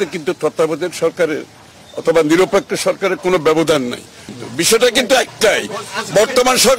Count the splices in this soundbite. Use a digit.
1